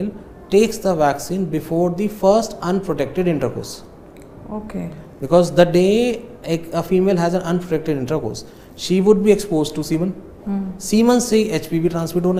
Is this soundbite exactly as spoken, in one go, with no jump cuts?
yes; 0 cuts

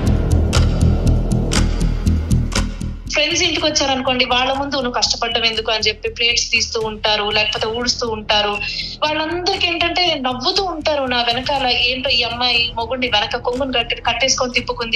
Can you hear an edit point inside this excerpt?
yes; 1 cut; at 3.0 s

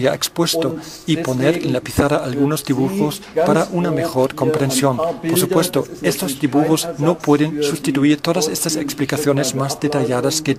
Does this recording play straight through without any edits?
yes; 0 cuts

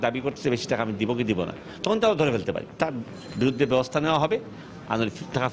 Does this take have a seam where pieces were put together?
yes; 1 cut; at 2.8 s

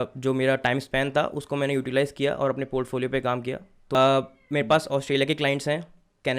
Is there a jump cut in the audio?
yes; 1 cut; at 3.8 s

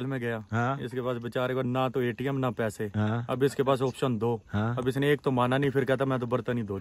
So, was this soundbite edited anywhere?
no; 0 cuts

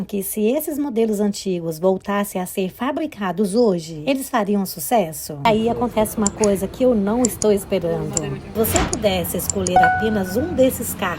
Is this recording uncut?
no; 2 cuts; at 5.5 s, 8.6 s

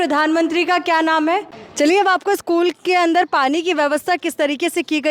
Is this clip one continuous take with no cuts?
no; 1 cut; at 1.6 s

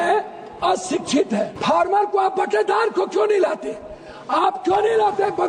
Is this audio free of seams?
no; 1 cut; at 1.5 s

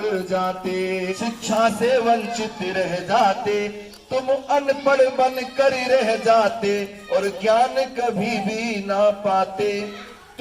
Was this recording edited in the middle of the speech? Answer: yes; 1 cut; at 1.1 s

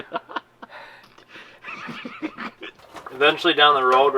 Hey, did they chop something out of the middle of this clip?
yes; 1 cut; at 2.8 s

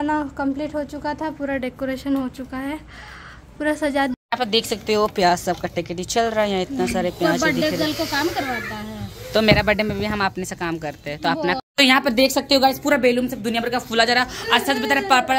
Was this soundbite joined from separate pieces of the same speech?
yes; 2 cuts; at 4.1 s, 11.6 s

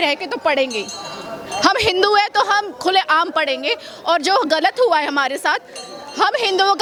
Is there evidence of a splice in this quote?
no; 0 cuts

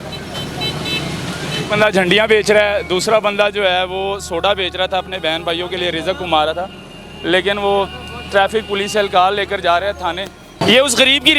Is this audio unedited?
no; 1 cut; at 10.4 s

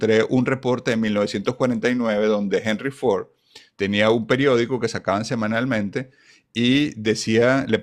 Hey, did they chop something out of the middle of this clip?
no; 0 cuts

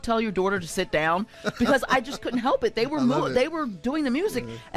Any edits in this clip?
no; 0 cuts

